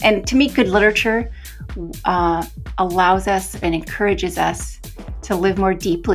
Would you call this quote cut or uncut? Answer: uncut